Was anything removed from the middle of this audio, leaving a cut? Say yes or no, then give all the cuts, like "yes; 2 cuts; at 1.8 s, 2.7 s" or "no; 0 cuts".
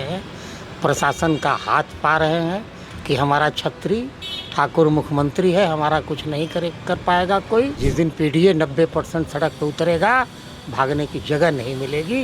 yes; 1 cut; at 7.8 s